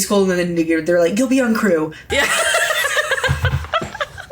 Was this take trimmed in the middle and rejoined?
yes; 1 cut; at 2.0 s

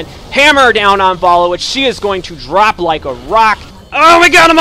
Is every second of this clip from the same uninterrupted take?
no; 1 cut; at 3.7 s

